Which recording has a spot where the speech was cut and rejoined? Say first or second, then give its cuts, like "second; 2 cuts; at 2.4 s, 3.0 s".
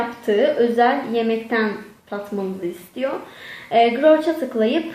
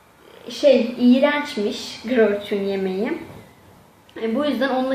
second; 1 cut; at 2.6 s